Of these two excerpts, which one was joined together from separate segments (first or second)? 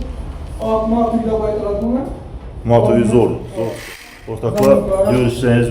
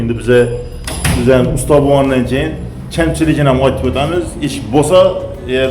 first